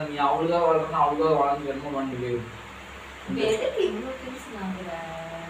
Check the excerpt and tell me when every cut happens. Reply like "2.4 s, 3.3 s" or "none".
4.2 s